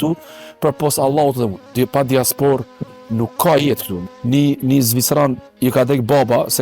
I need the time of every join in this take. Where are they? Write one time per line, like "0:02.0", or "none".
0:01.6
0:03.9